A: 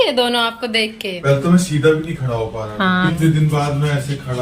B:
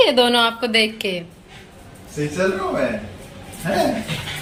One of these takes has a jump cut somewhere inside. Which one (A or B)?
A